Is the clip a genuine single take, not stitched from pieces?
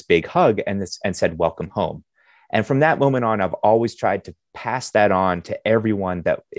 yes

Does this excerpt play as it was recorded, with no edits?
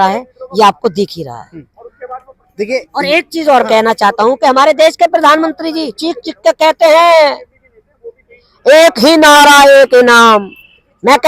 yes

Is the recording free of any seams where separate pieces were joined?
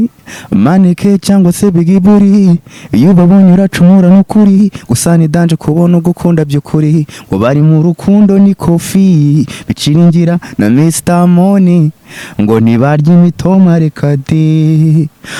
yes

